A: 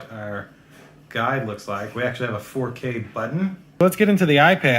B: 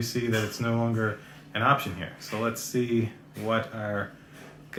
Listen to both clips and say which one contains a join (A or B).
A